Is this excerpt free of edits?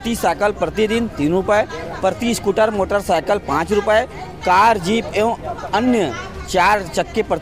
yes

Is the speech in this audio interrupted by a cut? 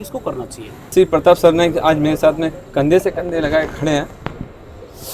yes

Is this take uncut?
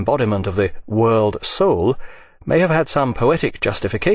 no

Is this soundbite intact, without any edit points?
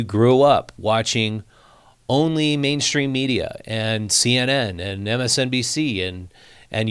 yes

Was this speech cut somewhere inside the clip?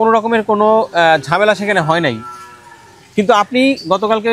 no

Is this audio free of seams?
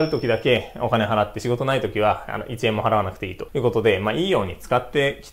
yes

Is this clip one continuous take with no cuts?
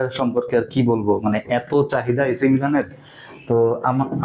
yes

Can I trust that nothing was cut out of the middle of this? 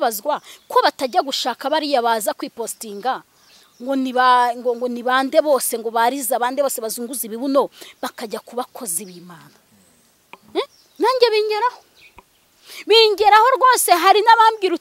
no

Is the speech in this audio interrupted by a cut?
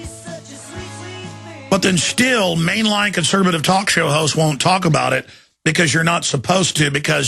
yes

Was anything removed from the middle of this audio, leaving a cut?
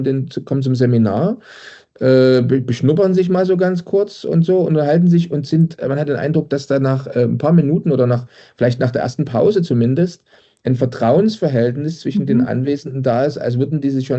no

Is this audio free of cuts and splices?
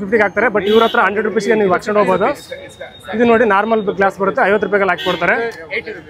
yes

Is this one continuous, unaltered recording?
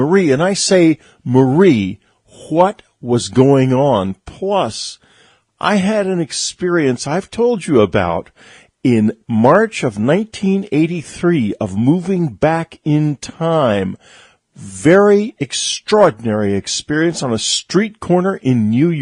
yes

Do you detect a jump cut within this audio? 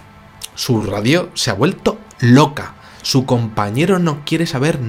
no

